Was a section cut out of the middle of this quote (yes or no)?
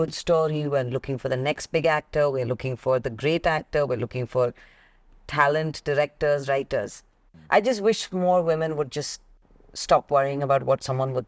yes